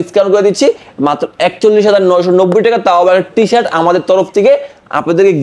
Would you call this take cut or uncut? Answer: uncut